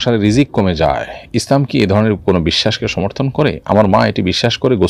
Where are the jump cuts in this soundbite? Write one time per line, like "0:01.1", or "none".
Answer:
none